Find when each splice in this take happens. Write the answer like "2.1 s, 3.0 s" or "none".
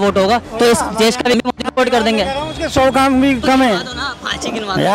1.3 s